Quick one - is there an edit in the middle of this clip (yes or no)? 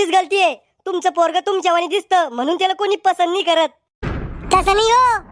yes